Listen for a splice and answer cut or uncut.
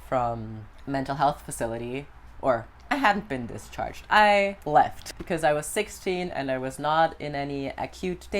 cut